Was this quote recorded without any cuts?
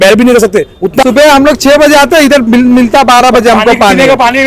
no; 1 cut; at 1.0 s

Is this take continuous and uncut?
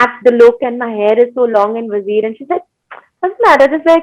yes; 0 cuts

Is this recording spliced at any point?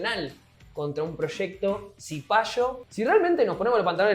yes; 1 cut; at 2.8 s

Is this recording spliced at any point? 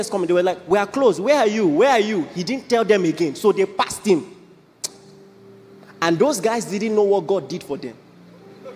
no; 0 cuts

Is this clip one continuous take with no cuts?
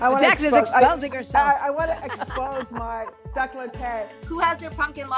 no; 1 cut; at 4.2 s

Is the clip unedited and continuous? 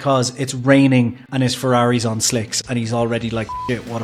yes; 0 cuts

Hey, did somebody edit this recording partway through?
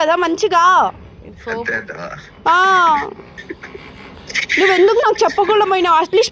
no; 0 cuts

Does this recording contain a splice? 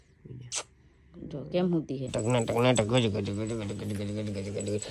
yes; 1 cut; at 2.1 s

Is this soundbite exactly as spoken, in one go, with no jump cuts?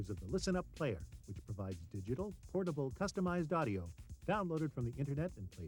yes; 0 cuts

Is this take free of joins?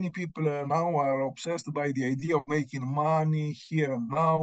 yes; 0 cuts

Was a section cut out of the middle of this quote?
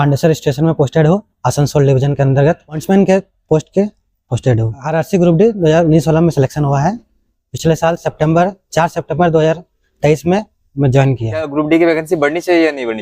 yes; 3 cuts; at 2.8 s, 4.7 s, 11.5 s

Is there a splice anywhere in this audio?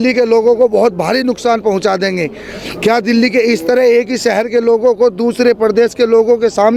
no; 0 cuts

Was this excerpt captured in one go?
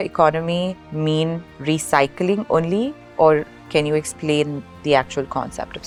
yes; 0 cuts

